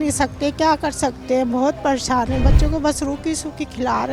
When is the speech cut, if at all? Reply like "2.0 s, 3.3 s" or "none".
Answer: none